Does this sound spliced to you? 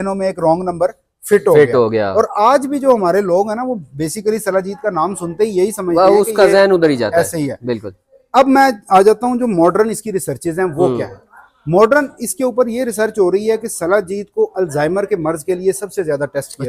no; 0 cuts

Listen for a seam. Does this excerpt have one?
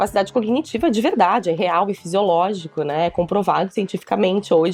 no; 0 cuts

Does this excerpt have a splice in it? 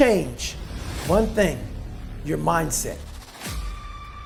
no; 0 cuts

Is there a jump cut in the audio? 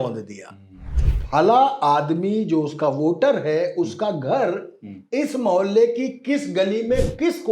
yes; 1 cut; at 1.0 s

